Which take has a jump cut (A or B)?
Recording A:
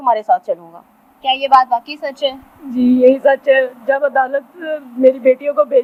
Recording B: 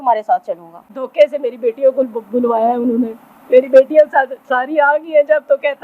B